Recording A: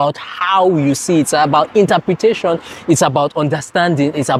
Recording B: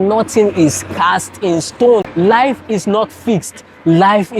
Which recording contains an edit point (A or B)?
B